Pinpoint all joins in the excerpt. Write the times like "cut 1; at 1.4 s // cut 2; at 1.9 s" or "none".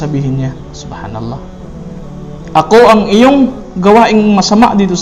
none